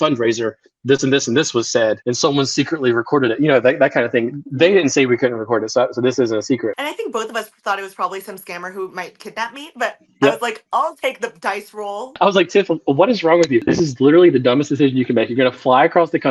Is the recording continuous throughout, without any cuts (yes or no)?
no